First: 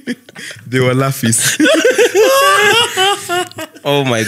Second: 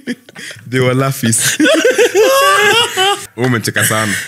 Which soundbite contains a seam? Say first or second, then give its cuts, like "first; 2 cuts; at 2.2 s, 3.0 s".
second; 1 cut; at 3.2 s